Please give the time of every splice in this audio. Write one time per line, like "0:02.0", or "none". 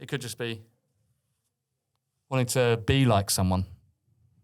none